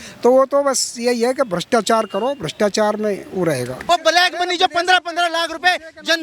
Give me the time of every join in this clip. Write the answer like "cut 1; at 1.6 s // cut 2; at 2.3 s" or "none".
cut 1; at 3.8 s